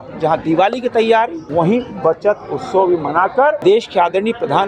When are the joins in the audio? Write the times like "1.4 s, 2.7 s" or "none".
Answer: 1.4 s, 3.6 s